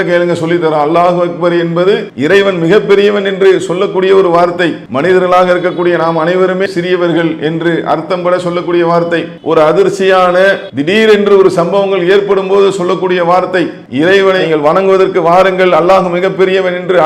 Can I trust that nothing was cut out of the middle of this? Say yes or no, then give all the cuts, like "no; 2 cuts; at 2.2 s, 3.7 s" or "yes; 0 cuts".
no; 5 cuts; at 2.1 s, 4.8 s, 9.3 s, 10.7 s, 13.8 s